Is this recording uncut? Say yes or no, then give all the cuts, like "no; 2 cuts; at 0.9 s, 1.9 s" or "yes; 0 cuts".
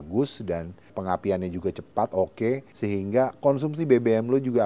no; 2 cuts; at 0.9 s, 2.7 s